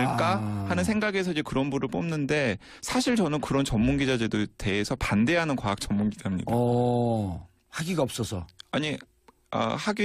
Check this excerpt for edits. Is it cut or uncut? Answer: uncut